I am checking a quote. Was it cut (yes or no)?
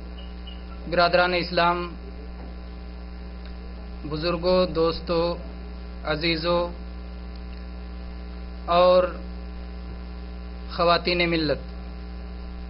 no